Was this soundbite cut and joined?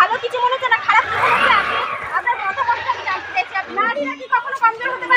yes; 1 cut; at 3.7 s

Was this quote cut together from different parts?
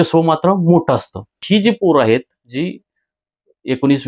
yes; 1 cut; at 1.3 s

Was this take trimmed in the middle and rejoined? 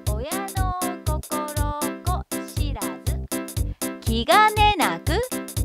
no; 0 cuts

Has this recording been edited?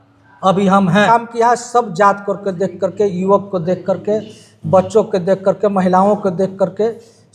yes; 1 cut; at 1.1 s

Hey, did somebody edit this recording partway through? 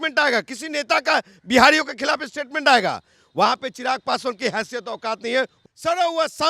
yes; 1 cut; at 5.6 s

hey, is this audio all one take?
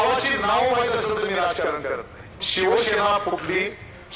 no; 1 cut; at 2.4 s

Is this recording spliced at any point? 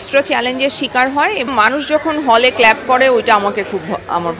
yes; 1 cut; at 1.5 s

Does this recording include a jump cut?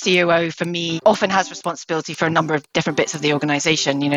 yes; 1 cut; at 0.9 s

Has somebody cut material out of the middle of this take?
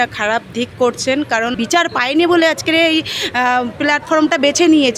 yes; 1 cut; at 1.6 s

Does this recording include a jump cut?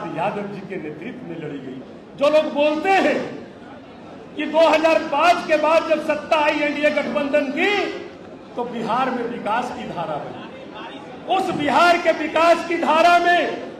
yes; 1 cut; at 1.9 s

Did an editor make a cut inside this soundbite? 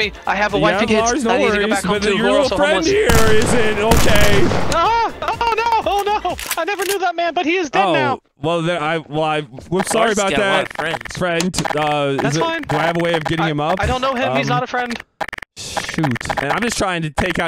no; 0 cuts

